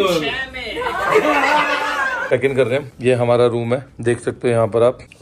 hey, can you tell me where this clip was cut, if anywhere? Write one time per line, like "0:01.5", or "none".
0:02.2